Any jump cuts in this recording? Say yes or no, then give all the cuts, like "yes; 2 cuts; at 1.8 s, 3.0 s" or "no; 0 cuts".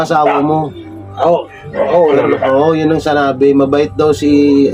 no; 0 cuts